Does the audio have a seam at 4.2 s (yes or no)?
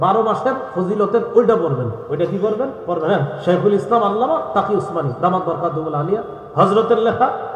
no